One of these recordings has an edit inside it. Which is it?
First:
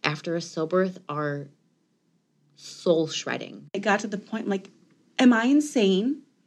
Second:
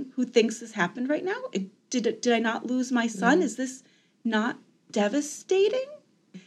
first; 1 cut; at 3.7 s

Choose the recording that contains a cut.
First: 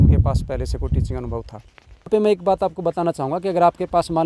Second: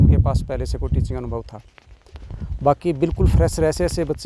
first; 1 cut; at 2.1 s

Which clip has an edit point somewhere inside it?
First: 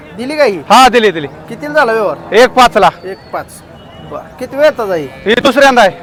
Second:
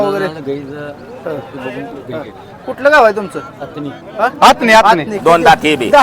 second; 1 cut; at 5.1 s

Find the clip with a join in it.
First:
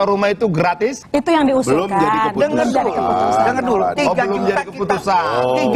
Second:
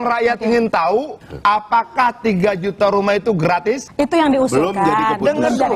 second; 1 cut; at 1.1 s

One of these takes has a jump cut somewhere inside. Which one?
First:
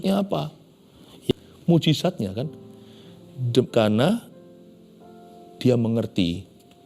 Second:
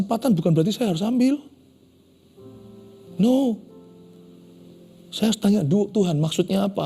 first; 1 cut; at 1.3 s

